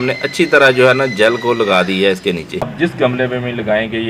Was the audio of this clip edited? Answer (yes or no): yes